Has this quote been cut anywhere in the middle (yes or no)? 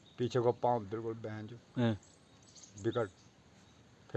no